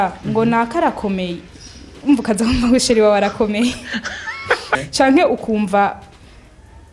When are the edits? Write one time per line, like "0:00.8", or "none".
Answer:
0:01.5
0:04.8